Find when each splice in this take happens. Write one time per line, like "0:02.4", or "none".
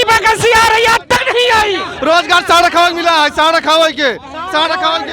0:01.9